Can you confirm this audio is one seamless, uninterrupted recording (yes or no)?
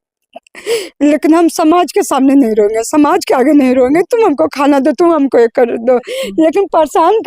no